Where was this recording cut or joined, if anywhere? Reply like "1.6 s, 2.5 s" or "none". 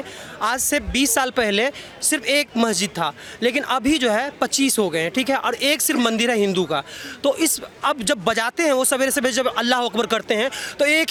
none